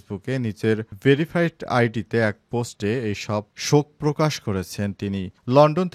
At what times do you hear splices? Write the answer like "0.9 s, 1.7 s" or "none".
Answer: none